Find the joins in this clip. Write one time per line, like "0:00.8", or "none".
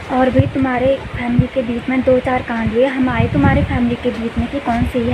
none